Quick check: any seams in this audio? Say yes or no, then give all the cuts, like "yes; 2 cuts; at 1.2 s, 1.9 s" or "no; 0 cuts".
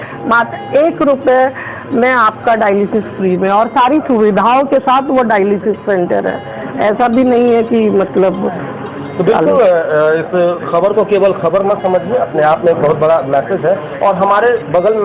no; 0 cuts